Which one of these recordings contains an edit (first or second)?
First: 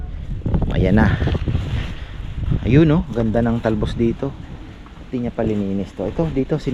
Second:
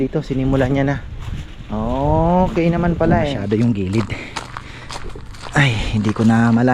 second